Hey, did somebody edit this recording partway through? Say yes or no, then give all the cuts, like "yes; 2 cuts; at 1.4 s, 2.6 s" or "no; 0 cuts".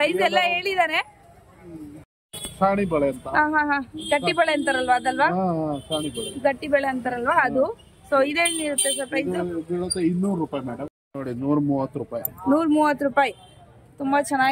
yes; 1 cut; at 10.8 s